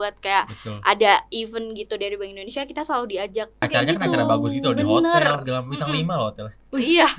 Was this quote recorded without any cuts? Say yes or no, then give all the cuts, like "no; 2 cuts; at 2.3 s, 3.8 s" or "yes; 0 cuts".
no; 1 cut; at 3.6 s